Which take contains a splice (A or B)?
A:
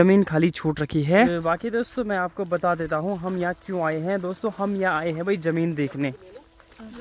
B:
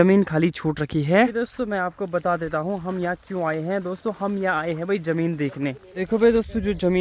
B